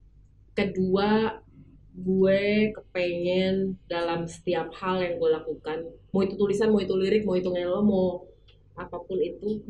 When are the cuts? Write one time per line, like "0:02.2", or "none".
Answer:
none